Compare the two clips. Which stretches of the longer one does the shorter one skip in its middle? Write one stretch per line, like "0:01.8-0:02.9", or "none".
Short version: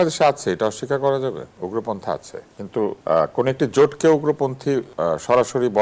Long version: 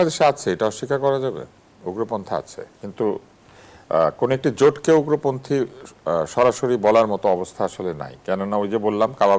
0:01.5-0:01.7
0:03.2-0:03.8
0:05.7-0:06.0